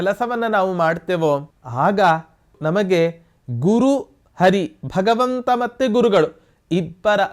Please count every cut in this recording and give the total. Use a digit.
2